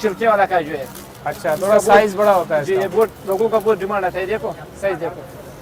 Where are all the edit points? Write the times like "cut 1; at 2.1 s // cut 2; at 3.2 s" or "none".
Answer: none

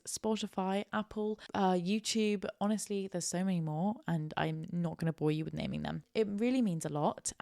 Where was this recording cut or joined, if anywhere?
cut 1; at 6.0 s

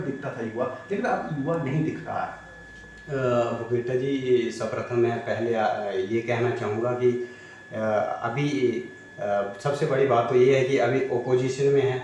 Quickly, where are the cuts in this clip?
none

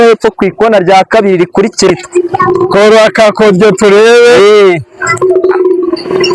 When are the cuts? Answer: cut 1; at 1.9 s

